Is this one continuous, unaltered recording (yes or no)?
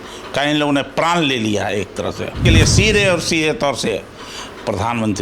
no